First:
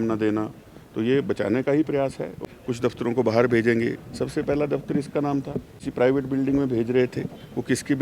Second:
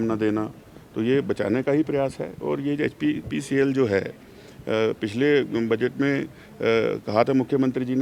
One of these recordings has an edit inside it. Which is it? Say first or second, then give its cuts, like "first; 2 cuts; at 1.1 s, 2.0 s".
first; 2 cuts; at 2.4 s, 5.8 s